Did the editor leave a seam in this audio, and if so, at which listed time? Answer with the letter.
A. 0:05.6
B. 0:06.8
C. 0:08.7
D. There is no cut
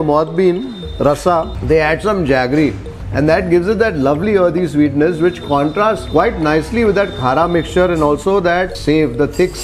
C